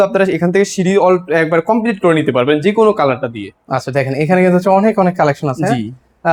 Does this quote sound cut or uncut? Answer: uncut